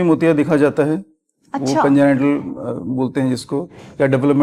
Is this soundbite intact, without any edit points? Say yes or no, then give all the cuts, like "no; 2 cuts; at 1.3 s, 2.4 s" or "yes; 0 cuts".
yes; 0 cuts